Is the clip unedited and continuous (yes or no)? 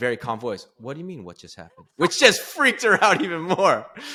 yes